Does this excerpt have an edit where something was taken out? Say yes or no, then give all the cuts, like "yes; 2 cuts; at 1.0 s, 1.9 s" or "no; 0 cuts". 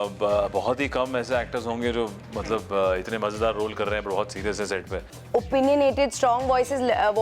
yes; 1 cut; at 5.1 s